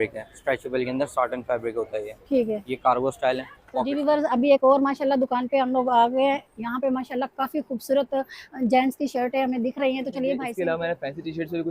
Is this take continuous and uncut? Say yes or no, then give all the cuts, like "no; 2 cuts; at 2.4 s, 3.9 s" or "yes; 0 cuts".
no; 2 cuts; at 3.9 s, 10.5 s